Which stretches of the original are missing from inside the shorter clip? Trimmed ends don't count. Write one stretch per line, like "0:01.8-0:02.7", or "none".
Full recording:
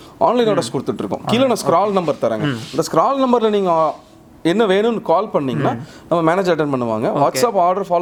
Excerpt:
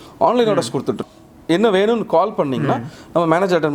0:01.1-0:04.1